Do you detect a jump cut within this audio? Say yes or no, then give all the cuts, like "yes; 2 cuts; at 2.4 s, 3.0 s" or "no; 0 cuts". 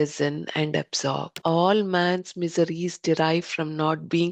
yes; 1 cut; at 1.3 s